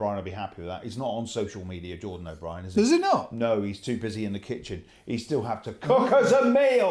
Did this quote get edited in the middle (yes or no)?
no